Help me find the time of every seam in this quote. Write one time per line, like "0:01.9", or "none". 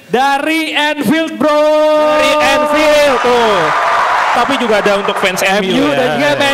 0:04.4